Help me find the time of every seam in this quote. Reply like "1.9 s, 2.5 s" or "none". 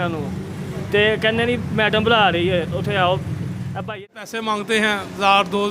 3.9 s